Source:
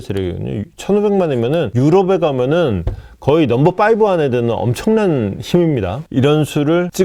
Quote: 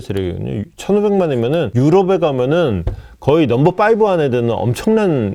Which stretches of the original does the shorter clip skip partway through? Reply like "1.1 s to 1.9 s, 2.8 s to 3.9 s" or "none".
none